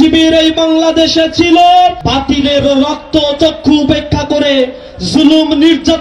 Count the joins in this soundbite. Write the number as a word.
one